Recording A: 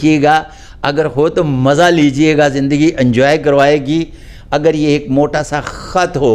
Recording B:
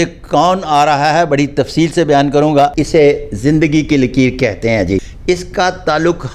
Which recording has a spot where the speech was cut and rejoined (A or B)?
B